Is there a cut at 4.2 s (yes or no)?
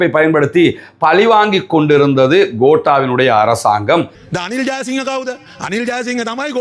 yes